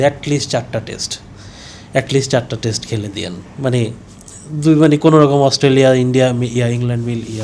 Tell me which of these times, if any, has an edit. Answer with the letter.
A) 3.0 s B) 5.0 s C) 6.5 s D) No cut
D